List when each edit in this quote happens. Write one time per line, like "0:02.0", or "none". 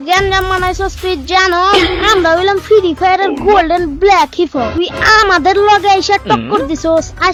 none